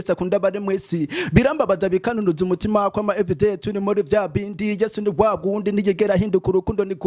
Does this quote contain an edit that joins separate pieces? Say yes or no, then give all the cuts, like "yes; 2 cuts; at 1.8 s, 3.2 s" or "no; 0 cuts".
no; 0 cuts